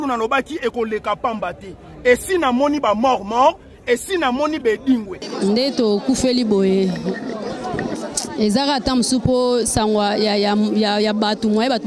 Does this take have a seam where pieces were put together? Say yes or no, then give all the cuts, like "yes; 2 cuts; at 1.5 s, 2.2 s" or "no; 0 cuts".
yes; 1 cut; at 5.2 s